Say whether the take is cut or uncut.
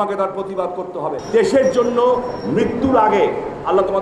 cut